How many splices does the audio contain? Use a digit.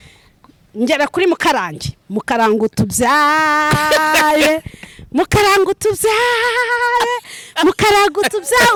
0